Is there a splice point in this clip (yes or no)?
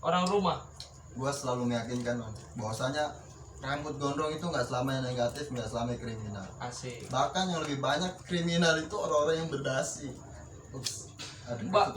no